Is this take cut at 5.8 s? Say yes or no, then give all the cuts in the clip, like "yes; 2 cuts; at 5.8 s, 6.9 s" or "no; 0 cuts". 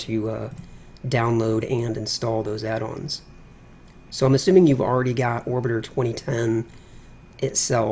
yes; 1 cut; at 5.8 s